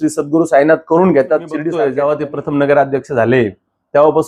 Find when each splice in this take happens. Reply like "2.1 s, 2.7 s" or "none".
1.5 s